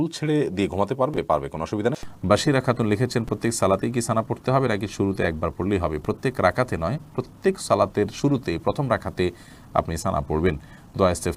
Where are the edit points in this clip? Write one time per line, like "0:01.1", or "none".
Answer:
none